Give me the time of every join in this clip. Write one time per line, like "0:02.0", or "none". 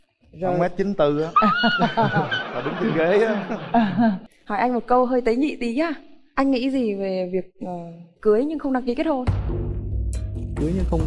0:04.3

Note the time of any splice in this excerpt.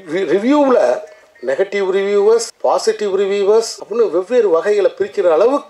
0:02.5
0:03.8

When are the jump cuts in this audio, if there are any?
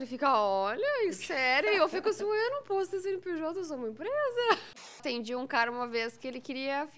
0:05.0

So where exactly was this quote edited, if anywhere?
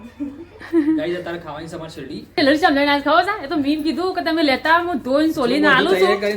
0:02.4

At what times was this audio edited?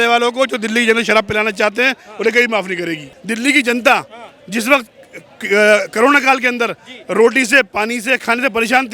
0:03.1

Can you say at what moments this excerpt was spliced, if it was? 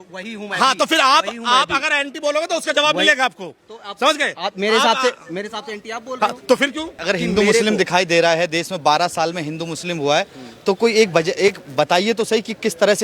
none

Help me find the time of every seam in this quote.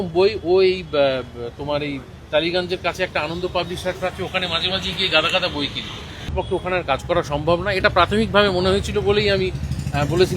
0:06.3

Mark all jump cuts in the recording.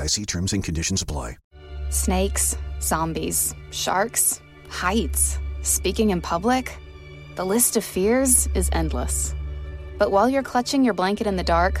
0:01.4

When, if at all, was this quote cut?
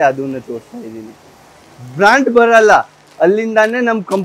none

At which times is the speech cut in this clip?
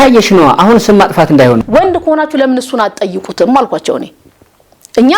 0:01.6

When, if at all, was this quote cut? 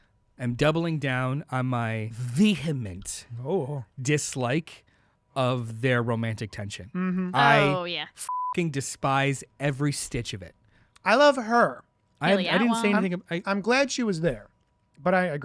0:02.2

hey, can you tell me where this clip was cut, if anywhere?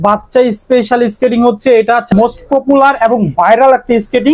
0:02.1

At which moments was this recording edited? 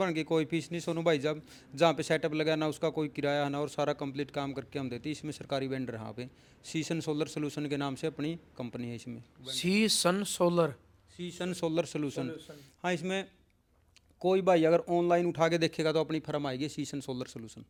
none

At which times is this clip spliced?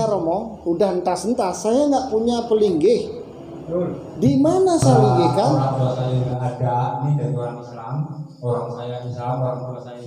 0:05.6

